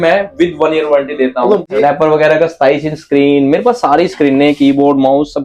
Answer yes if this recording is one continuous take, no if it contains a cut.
no